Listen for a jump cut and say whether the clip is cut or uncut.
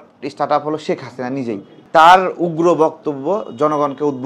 cut